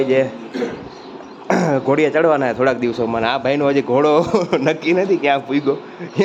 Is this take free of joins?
yes; 0 cuts

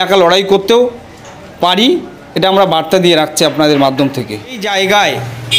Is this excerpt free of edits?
no; 1 cut; at 4.7 s

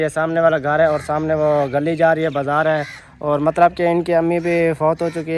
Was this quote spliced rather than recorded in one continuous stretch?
no; 0 cuts

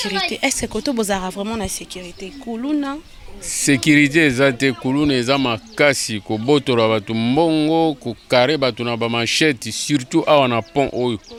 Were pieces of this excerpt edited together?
no; 0 cuts

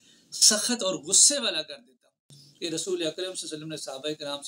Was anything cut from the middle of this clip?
yes; 1 cut; at 2.4 s

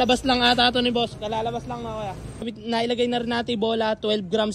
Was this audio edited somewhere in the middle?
yes; 1 cut; at 2.5 s

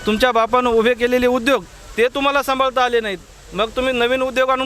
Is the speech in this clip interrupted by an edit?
no; 0 cuts

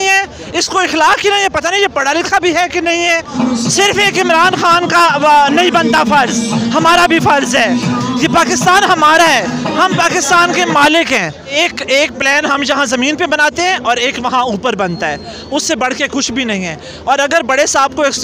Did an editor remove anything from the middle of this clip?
yes; 2 cuts; at 3.3 s, 11.5 s

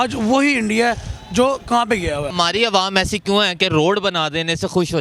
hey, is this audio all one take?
no; 1 cut; at 2.3 s

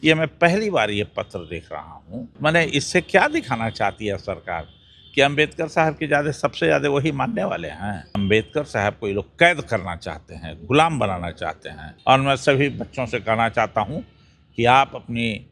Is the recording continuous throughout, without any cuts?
no; 3 cuts; at 2.4 s, 8.2 s, 11.8 s

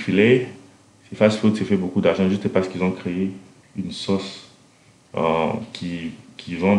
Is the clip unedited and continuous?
yes; 0 cuts

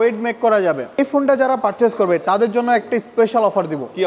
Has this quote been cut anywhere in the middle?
yes; 1 cut; at 1.0 s

